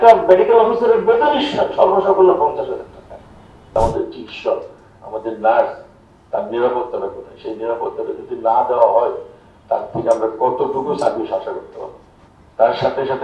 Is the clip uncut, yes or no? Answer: no